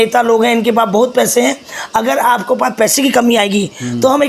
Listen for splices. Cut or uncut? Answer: uncut